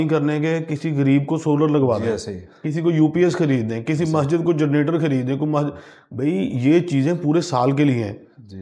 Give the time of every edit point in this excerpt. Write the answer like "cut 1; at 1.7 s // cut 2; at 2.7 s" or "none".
none